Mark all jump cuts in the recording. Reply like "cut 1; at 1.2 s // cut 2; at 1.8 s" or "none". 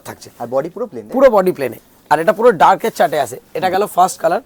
none